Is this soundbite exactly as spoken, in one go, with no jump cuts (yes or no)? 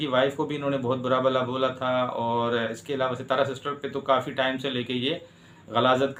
yes